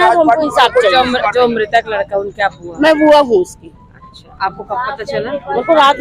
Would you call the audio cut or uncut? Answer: uncut